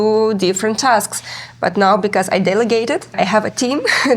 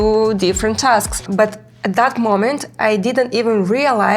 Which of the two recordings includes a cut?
second; 1 cut; at 1.2 s

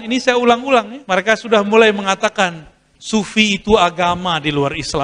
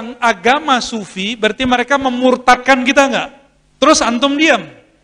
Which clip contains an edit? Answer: first; 1 cut; at 1.0 s

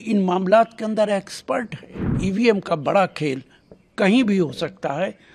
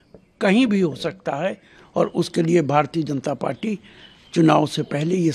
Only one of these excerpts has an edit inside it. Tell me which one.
first; 1 cut; at 2.2 s

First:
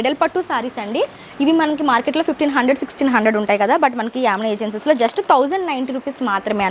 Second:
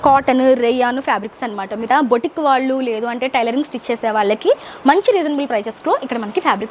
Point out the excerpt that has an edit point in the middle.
second; 1 cut; at 1.8 s

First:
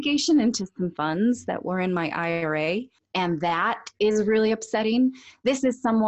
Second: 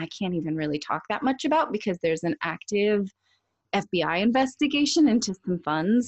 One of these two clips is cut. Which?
first; 1 cut; at 3.0 s

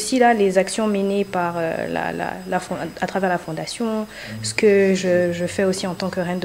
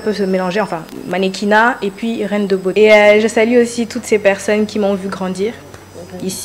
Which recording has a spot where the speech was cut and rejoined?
second; 1 cut; at 2.7 s

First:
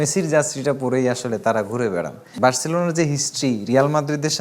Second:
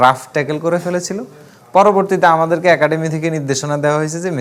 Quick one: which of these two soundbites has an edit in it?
first; 1 cut; at 2.2 s

